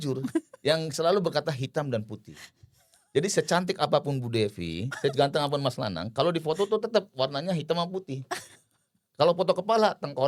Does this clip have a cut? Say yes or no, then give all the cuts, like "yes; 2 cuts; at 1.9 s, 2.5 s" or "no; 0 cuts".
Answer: no; 0 cuts